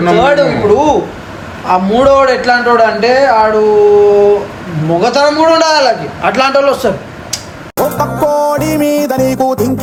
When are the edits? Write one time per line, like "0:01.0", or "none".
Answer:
none